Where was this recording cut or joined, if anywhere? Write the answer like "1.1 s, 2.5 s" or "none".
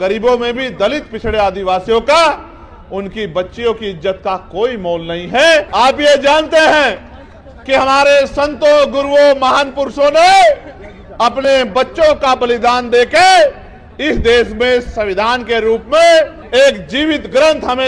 5.7 s, 16.4 s